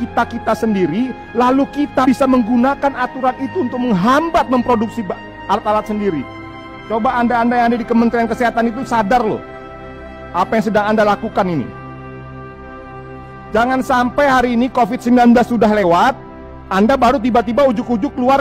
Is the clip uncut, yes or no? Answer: yes